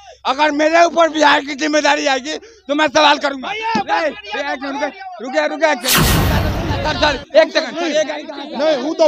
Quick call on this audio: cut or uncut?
cut